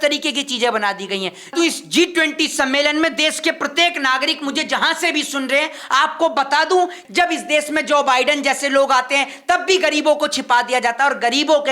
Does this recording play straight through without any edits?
no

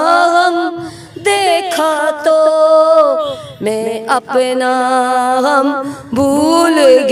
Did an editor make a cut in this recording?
no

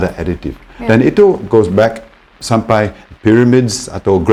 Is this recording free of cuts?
yes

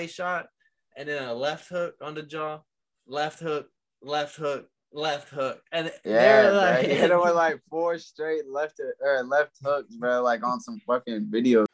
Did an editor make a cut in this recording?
no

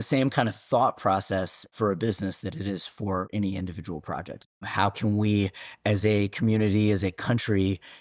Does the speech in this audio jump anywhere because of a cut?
yes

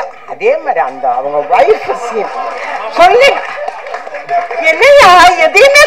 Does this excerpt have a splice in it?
no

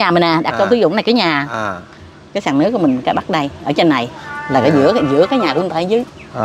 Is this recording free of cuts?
yes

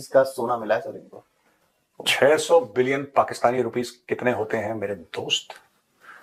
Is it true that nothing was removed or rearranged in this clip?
yes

